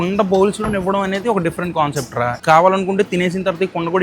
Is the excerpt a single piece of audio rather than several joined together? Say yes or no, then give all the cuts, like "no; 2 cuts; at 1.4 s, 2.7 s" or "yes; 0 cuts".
no; 1 cut; at 2.4 s